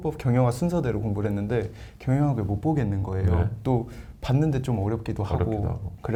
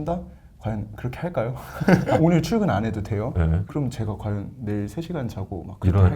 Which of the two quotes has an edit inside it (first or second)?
second